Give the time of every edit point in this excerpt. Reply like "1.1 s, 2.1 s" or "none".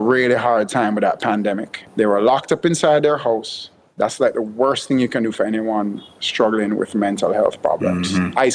1.9 s